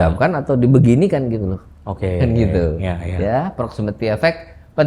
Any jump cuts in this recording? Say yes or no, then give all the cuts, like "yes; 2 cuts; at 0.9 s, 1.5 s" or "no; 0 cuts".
no; 0 cuts